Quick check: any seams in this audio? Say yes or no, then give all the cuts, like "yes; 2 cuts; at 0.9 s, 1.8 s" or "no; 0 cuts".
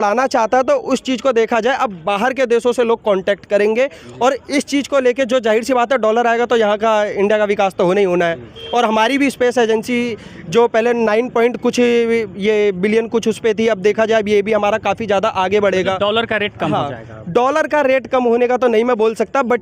no; 0 cuts